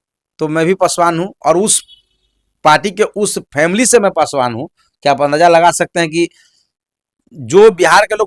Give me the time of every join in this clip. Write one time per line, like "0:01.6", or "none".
none